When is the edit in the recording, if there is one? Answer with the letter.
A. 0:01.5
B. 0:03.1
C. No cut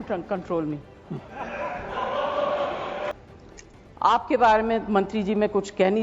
B